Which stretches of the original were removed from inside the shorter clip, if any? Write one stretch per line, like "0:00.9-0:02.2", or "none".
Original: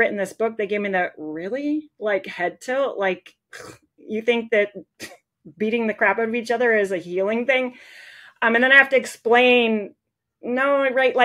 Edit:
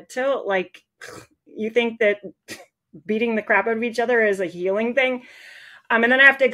none